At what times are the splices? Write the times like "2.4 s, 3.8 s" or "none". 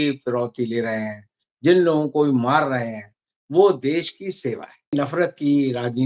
4.9 s